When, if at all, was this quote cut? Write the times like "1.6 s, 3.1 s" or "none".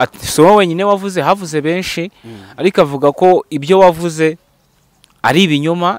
none